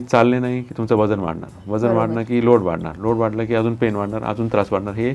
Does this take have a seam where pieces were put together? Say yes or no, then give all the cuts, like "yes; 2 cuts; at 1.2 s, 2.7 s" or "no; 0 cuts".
no; 0 cuts